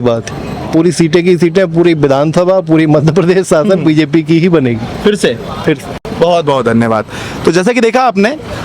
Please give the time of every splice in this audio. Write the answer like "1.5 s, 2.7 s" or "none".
none